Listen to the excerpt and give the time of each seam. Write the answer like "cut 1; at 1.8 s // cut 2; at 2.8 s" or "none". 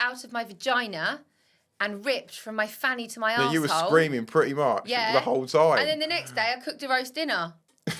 none